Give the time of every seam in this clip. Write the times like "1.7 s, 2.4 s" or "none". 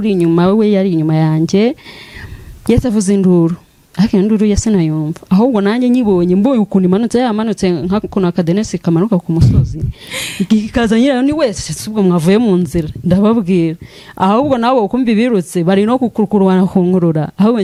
none